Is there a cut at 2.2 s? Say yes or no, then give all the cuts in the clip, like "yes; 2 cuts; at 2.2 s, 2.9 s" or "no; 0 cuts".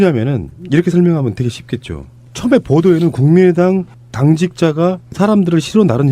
no; 1 cut; at 4.5 s